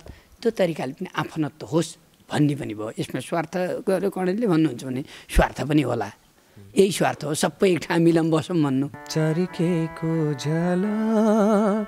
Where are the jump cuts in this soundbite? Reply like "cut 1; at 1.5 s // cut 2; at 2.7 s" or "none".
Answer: cut 1; at 9.0 s